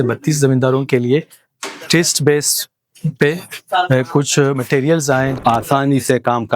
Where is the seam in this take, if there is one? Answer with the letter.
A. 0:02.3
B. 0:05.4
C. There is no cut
B